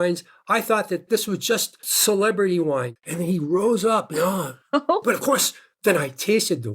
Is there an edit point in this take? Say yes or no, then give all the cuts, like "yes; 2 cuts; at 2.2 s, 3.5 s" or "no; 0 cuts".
yes; 2 cuts; at 1.1 s, 2.9 s